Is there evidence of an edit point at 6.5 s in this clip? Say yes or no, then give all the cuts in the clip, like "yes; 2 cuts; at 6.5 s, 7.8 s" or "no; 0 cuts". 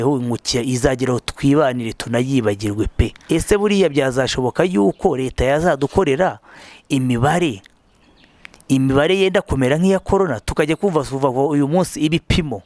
no; 1 cut; at 3.2 s